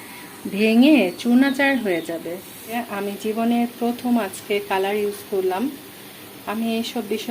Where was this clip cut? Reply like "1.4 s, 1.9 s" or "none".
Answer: 2.7 s